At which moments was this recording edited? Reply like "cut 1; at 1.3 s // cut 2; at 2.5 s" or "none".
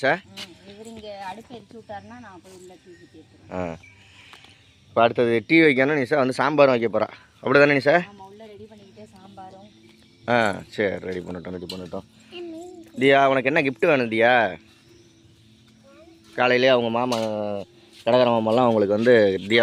none